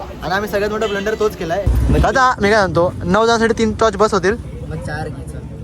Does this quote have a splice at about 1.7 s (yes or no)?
yes